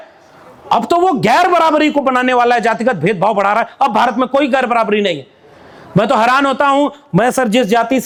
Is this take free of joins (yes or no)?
yes